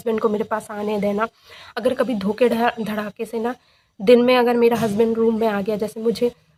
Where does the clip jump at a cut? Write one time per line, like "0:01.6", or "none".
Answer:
none